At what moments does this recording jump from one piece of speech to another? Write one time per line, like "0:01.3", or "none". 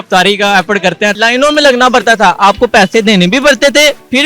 0:01.1